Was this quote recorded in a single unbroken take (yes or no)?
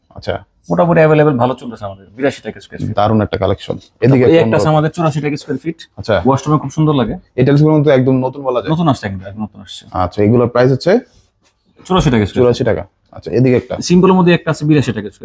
yes